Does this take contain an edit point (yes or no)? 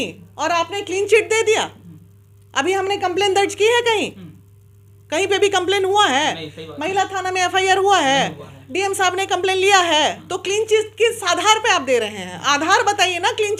no